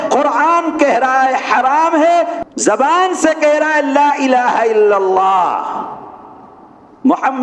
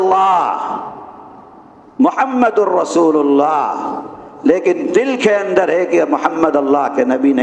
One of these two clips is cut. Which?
first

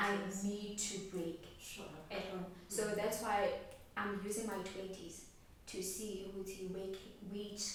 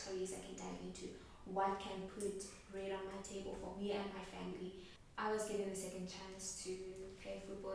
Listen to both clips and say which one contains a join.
second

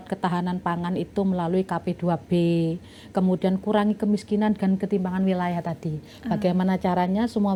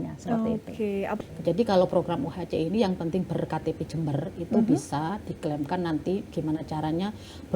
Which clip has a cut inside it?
second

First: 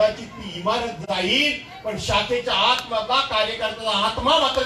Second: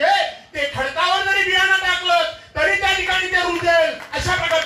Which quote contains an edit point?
first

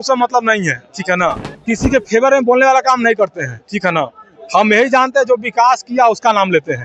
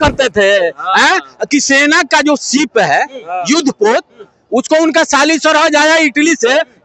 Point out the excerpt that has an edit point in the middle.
first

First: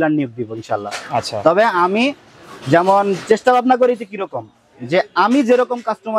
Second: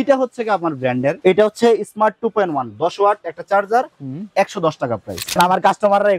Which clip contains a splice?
second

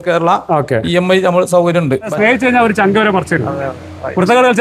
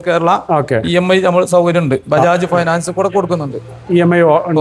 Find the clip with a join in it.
first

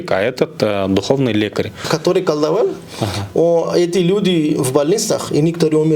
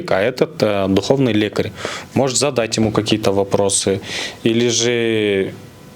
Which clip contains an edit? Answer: first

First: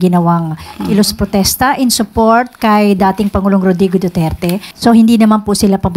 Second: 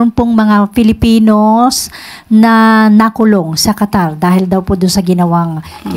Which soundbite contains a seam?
first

